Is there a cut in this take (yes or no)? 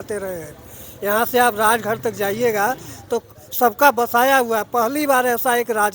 no